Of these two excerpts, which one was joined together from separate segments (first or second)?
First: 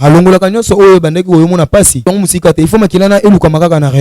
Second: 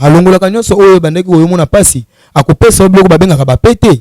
first